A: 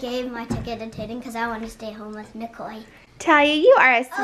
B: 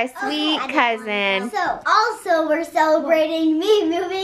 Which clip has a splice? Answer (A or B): B